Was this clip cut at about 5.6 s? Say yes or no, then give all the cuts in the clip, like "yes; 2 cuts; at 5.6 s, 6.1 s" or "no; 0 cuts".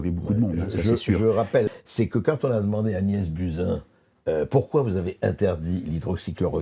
no; 1 cut; at 1.6 s